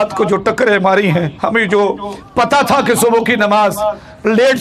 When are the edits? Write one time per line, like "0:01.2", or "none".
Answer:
0:01.3

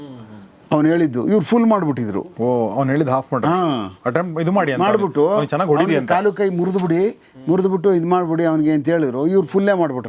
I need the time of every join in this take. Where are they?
none

